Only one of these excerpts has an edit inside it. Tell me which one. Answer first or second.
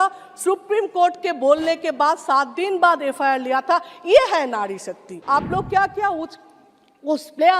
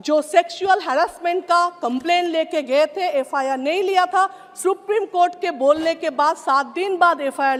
first